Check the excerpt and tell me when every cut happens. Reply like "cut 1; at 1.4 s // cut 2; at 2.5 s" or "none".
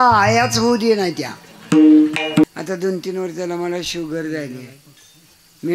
cut 1; at 2.4 s